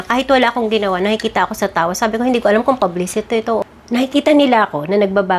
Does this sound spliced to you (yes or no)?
yes